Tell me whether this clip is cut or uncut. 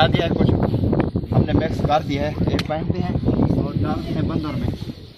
uncut